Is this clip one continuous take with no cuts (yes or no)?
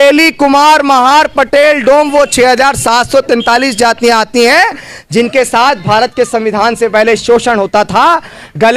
yes